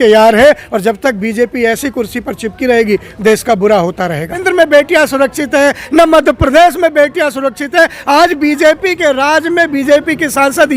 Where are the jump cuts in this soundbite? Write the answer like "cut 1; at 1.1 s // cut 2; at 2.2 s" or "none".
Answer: cut 1; at 4.4 s